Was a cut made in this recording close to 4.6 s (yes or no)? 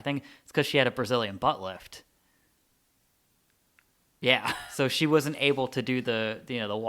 yes